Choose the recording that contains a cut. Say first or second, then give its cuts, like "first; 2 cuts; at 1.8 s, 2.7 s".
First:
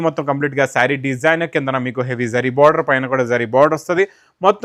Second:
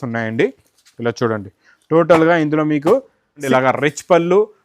second; 1 cut; at 3.4 s